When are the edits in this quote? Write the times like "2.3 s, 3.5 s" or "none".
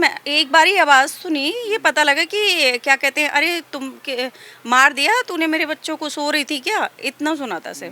none